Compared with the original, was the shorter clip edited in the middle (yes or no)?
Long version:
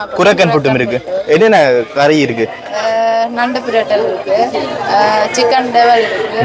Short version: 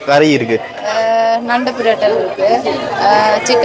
no